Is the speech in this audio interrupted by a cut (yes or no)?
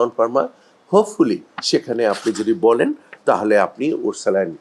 no